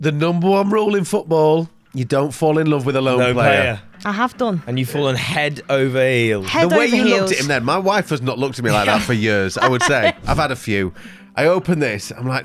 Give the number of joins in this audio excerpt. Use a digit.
1